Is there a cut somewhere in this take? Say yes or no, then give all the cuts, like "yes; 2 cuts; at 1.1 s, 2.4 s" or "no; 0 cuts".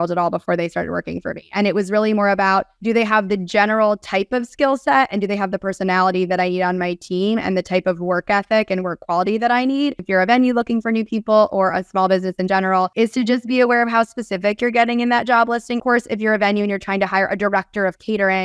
yes; 4 cuts; at 2.7 s, 10.0 s, 12.9 s, 15.8 s